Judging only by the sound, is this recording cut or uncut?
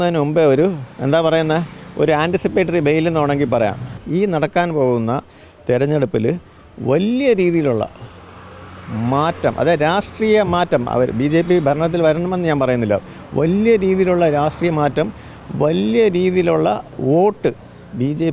cut